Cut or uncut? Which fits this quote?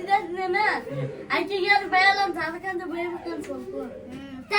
uncut